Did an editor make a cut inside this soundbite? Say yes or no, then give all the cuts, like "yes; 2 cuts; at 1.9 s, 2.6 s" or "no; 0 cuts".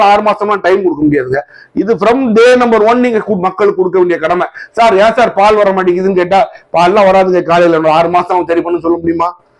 no; 0 cuts